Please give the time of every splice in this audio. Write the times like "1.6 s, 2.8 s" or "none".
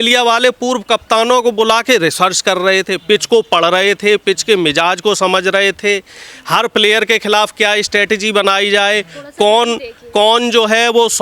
none